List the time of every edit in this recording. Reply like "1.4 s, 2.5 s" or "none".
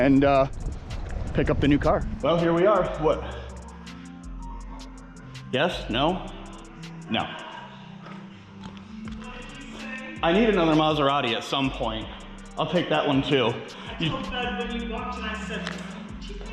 none